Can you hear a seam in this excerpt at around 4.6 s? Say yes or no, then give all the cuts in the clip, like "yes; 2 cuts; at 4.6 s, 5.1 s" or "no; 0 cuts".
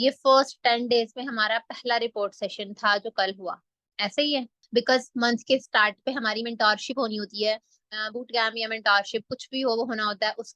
yes; 1 cut; at 4.6 s